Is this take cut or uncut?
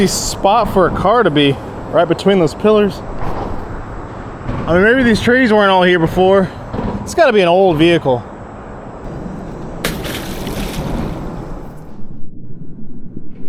uncut